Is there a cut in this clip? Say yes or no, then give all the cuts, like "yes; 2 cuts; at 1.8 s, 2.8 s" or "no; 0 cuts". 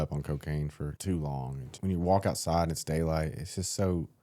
yes; 2 cuts; at 1.0 s, 1.6 s